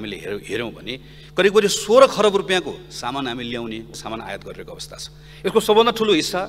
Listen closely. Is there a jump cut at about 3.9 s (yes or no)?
yes